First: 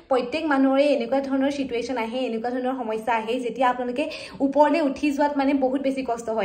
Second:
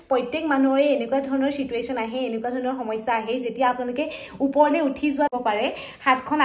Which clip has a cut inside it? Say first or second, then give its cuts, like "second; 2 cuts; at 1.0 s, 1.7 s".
second; 1 cut; at 5.3 s